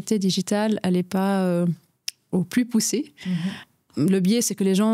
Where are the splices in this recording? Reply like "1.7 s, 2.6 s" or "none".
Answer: 3.2 s